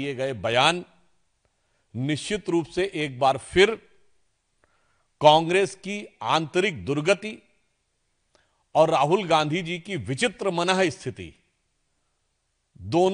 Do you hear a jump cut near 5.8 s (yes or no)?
no